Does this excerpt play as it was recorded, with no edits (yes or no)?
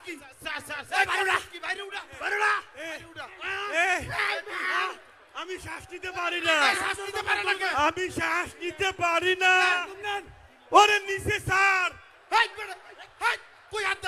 yes